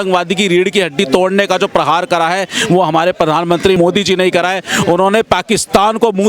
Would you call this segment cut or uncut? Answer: cut